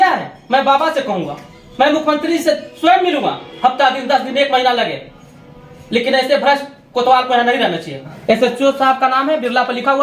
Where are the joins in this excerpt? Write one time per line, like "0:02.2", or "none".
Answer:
0:08.1